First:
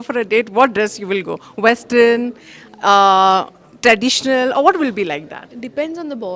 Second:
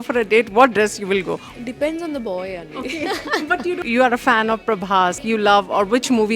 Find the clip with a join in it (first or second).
second